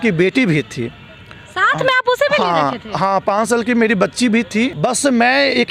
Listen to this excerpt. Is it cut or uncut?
cut